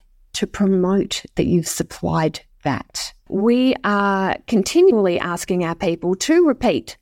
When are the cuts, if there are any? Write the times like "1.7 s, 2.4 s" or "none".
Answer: 3.2 s, 4.9 s